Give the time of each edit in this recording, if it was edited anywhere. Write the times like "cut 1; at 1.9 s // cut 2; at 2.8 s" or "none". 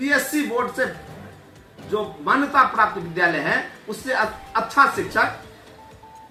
none